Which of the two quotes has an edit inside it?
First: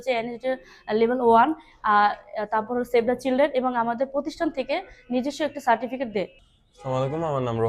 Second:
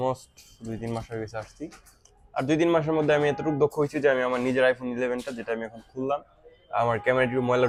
first; 1 cut; at 6.4 s

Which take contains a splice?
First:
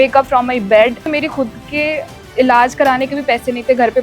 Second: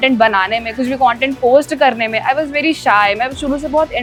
first; 1 cut; at 1.1 s

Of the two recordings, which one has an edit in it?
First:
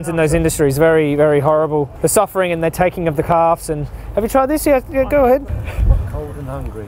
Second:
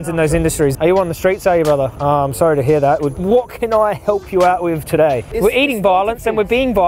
second; 4 cuts; at 0.7 s, 1.9 s, 3.1 s, 5.3 s

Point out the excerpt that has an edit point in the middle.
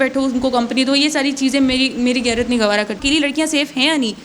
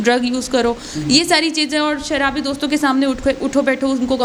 first; 1 cut; at 3.0 s

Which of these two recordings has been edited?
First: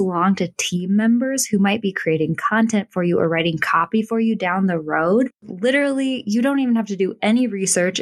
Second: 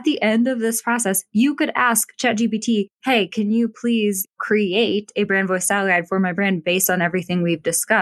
first; 1 cut; at 5.4 s

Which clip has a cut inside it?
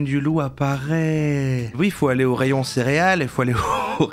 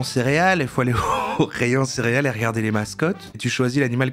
first; 1 cut; at 1.7 s

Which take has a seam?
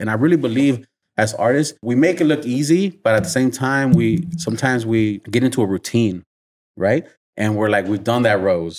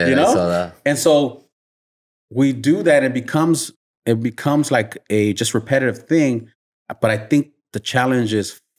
first; 2 cuts; at 1.8 s, 5.2 s

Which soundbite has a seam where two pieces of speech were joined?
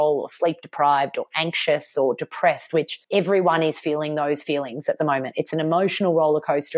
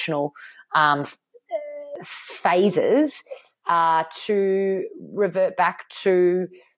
first; 1 cut; at 3.0 s

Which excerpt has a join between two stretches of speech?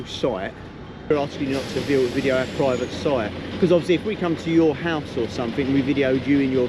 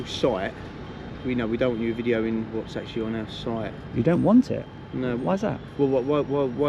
first; 1 cut; at 1.1 s

